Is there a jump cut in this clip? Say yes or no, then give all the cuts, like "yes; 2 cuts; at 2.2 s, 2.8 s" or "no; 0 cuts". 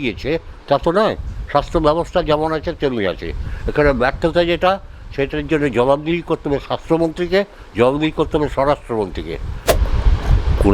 yes; 1 cut; at 9.7 s